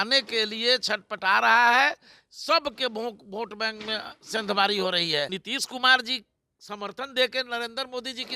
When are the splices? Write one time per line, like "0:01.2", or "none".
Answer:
0:05.4

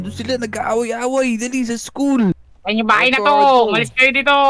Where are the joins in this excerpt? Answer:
0:02.4

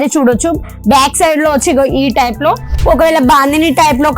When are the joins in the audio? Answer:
0:02.7

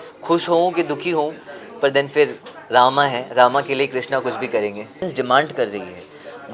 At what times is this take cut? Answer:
0:05.0

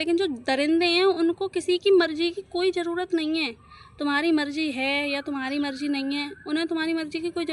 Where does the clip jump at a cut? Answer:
none

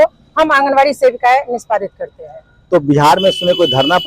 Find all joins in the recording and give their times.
none

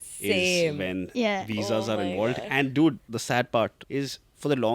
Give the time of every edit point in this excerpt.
0:03.1
0:03.8

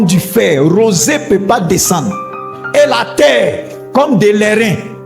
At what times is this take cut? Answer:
0:03.8

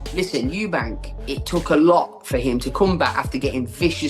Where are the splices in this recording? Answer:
0:01.1

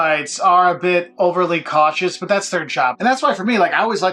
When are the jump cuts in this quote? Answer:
0:02.9

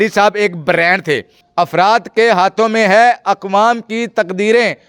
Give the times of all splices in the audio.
0:01.4

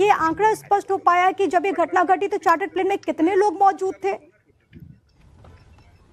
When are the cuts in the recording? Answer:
0:01.9

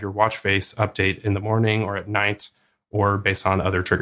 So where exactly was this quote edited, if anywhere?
none

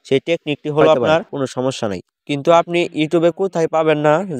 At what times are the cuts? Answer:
0:01.4

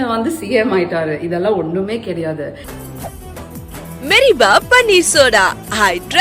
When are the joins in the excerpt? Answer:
0:02.7

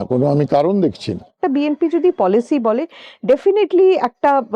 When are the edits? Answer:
0:01.4

